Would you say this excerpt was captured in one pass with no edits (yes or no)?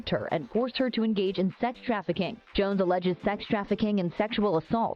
no